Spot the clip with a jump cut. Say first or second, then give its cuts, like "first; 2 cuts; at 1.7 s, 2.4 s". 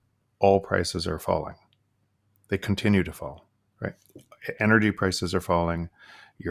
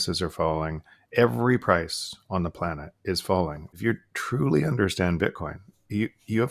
second; 2 cuts; at 1.0 s, 3.8 s